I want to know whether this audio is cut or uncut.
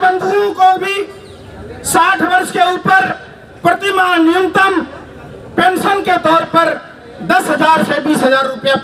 uncut